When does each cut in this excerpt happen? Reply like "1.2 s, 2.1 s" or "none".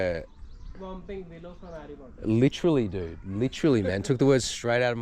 none